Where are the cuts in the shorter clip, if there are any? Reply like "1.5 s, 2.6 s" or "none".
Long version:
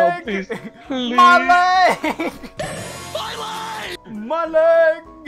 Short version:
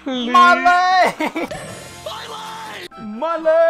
1.5 s